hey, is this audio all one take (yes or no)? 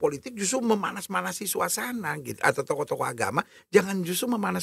yes